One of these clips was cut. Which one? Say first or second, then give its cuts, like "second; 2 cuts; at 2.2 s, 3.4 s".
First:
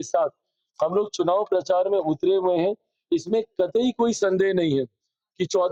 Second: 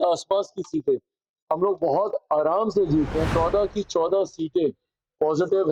second; 1 cut; at 3.3 s